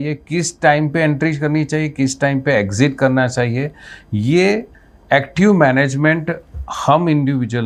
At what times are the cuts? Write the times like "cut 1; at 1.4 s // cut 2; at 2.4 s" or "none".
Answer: none